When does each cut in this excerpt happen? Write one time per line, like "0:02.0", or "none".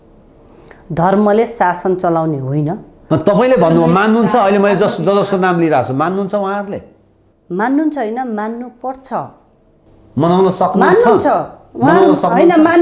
0:03.1

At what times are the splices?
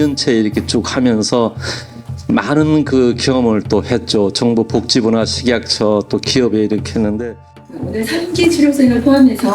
0:07.9

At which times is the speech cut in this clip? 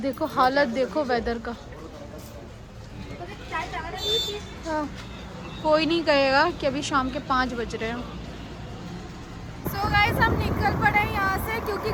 none

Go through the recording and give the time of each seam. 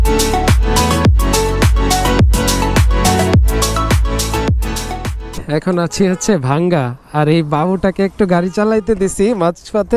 none

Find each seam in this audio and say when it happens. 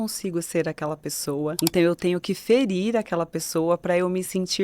0:01.6

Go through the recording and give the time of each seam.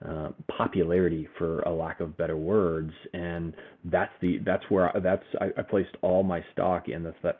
none

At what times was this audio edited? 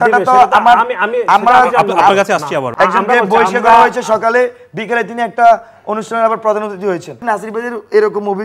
0:02.7
0:07.1

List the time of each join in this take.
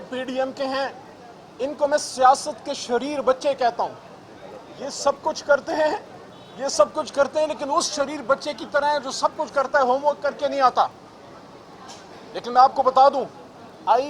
none

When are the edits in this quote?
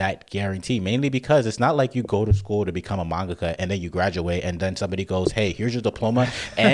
none

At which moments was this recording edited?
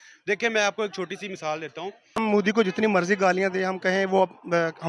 0:02.2

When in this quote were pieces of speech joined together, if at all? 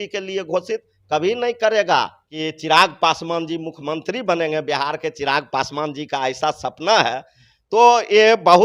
0:02.2

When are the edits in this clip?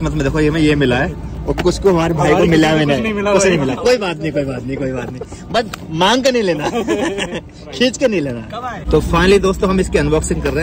none

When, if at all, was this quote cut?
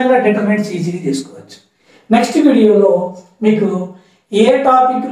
0:01.9

